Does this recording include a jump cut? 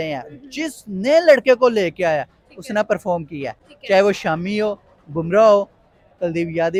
no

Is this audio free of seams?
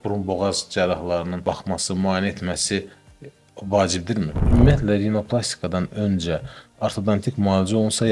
no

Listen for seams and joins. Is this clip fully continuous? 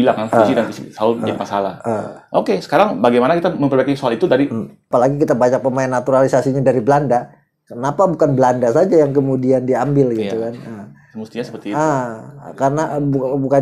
no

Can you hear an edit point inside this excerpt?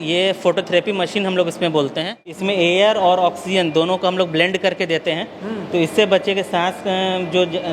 yes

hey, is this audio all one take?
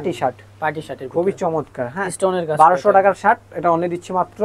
yes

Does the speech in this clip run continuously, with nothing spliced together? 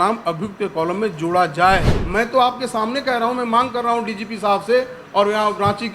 no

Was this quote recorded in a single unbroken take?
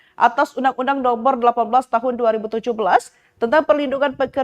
no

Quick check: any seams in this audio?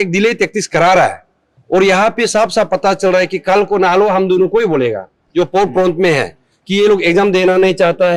no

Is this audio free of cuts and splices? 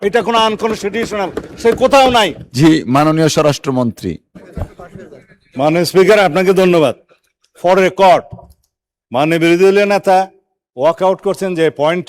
no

